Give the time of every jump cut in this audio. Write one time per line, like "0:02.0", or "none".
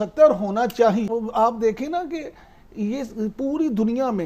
0:01.1